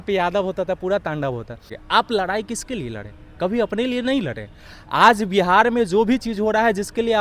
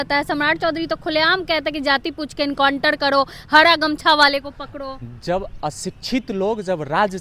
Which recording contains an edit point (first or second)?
first